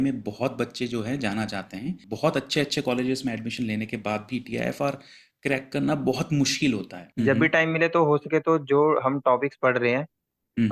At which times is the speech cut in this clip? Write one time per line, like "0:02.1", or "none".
0:02.1
0:07.0